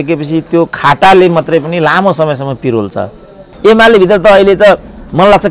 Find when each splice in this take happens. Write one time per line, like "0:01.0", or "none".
0:03.5